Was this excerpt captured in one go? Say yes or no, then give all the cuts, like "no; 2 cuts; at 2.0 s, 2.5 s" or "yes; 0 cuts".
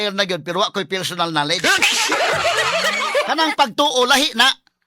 no; 1 cut; at 3.1 s